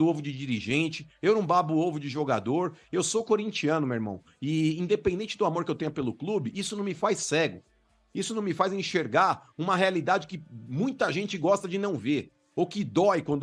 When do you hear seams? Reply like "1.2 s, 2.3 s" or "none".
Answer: none